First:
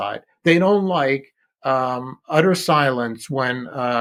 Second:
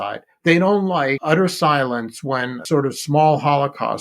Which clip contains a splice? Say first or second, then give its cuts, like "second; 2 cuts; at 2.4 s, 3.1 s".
second; 2 cuts; at 1.2 s, 2.6 s